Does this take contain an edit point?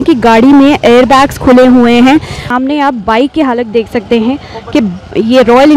yes; 1 cut; at 2.4 s

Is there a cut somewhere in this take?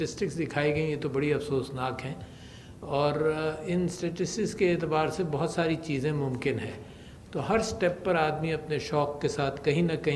yes; 1 cut; at 3.1 s

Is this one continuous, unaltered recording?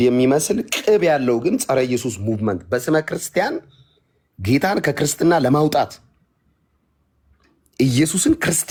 yes; 0 cuts

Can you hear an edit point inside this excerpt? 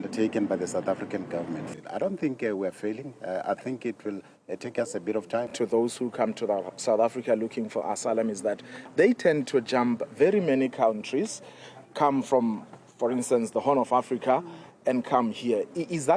yes; 2 cuts; at 1.7 s, 5.5 s

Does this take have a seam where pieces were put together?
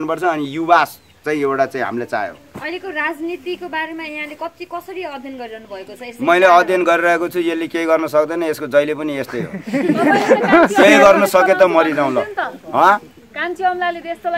no; 0 cuts

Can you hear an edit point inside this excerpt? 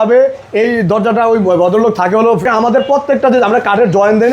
yes; 1 cut; at 2.5 s

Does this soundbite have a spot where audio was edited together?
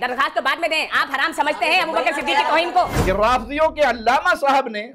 yes; 1 cut; at 3.0 s

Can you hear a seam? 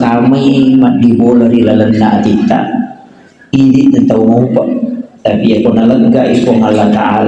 no; 0 cuts

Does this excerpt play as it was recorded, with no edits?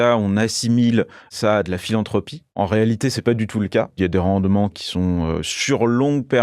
no; 4 cuts; at 1.3 s, 2.6 s, 4.0 s, 4.8 s

